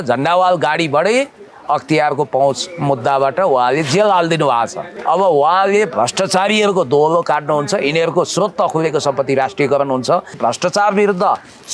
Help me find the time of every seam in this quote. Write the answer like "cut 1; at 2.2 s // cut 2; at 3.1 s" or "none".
cut 1; at 4.9 s // cut 2; at 10.4 s